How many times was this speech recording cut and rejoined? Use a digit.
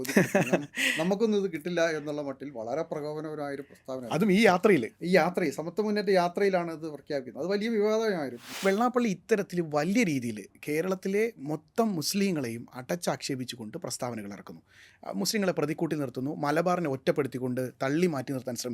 1